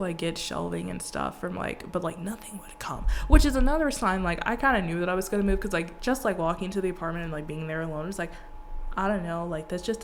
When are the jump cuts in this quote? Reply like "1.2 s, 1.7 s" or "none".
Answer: none